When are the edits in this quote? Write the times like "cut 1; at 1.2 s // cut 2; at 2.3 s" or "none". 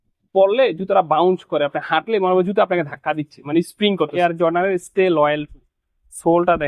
cut 1; at 4.1 s